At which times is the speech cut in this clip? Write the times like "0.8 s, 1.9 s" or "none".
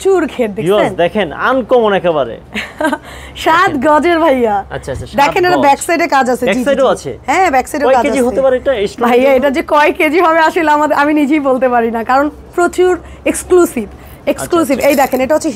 none